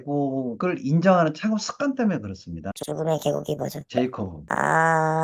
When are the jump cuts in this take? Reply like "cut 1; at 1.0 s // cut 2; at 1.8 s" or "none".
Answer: none